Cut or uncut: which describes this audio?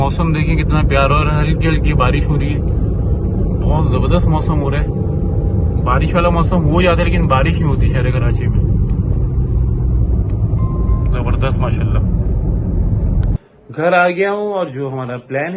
uncut